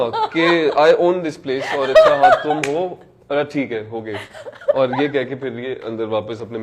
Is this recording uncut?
yes; 0 cuts

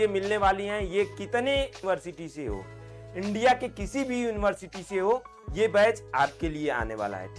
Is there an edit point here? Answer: yes; 1 cut; at 1.8 s

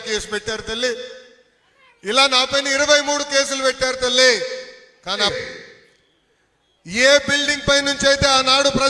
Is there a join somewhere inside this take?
yes; 1 cut; at 5.3 s

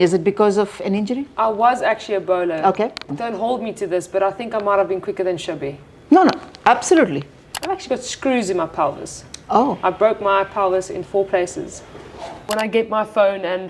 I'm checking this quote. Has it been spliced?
yes; 3 cuts; at 3.1 s, 7.4 s, 12.5 s

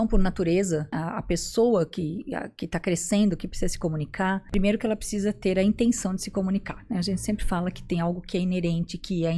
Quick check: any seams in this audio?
yes; 2 cuts; at 0.9 s, 4.5 s

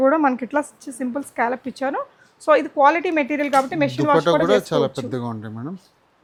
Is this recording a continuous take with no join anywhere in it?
yes; 0 cuts

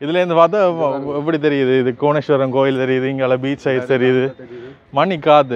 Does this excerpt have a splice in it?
no; 0 cuts

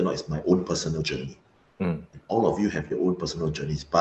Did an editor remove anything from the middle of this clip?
no; 0 cuts

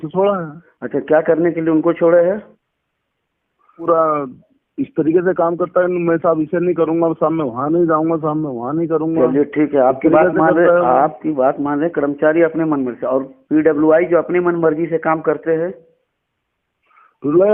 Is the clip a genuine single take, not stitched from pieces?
no; 1 cut; at 3.9 s

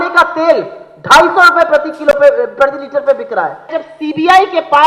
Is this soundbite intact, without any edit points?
no; 1 cut; at 3.8 s

